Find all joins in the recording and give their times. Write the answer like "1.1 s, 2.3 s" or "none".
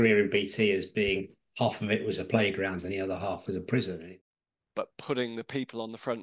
4.0 s